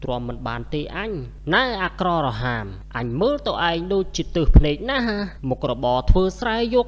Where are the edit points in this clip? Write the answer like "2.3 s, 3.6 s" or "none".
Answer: 1.3 s